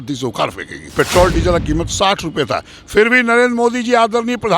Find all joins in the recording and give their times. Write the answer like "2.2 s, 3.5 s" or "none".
0.9 s